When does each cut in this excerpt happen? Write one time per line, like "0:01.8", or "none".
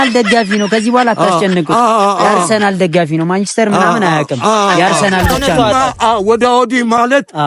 0:05.4